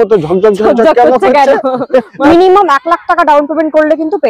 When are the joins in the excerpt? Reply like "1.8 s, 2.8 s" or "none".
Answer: 2.2 s